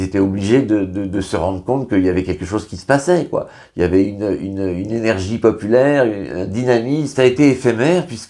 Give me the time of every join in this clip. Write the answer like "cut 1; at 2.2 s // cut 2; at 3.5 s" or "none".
cut 1; at 7.1 s